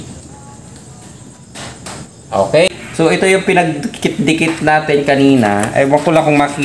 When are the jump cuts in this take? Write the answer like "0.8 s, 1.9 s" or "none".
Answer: 2.7 s